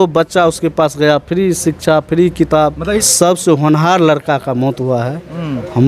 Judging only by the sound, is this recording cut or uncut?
cut